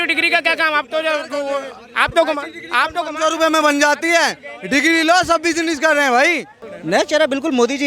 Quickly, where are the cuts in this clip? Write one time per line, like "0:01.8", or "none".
0:06.6

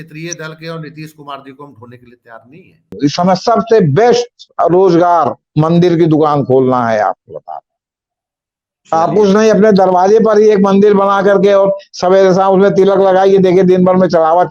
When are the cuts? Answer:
0:02.9

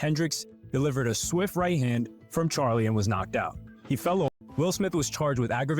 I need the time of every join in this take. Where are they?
0:04.4

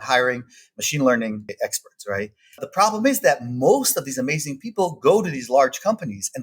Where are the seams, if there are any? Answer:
0:01.5
0:02.6

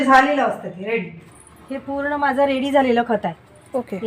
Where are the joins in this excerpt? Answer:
0:01.2

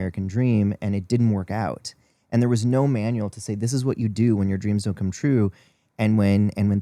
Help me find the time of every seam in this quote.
none

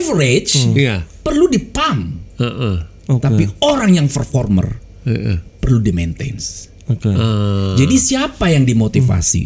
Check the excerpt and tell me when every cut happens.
0:01.1

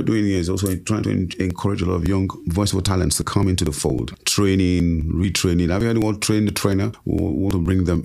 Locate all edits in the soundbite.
0:02.4
0:04.2
0:07.0

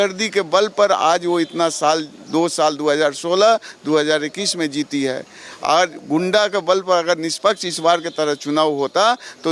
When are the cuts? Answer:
none

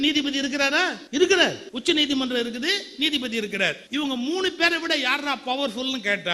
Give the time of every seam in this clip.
0:01.0
0:01.7
0:03.8

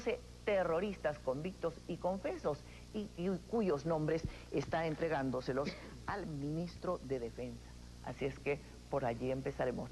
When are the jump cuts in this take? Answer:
none

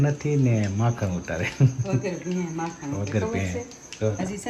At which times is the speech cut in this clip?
none

